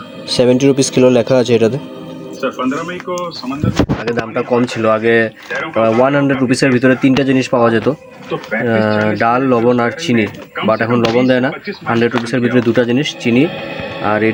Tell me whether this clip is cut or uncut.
uncut